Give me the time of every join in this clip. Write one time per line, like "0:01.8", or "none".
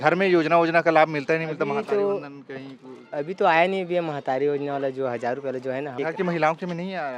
0:05.9